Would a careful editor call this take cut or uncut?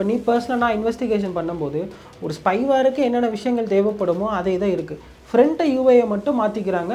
uncut